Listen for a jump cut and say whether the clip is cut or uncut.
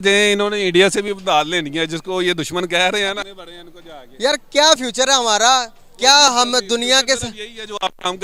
uncut